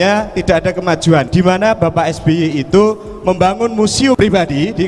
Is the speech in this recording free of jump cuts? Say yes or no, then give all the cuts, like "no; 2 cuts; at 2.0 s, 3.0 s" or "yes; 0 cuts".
no; 2 cuts; at 1.3 s, 4.2 s